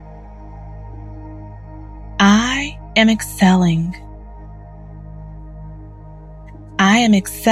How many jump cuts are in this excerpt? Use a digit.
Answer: 2